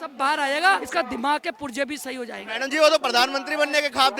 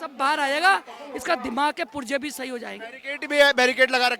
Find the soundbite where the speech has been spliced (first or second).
first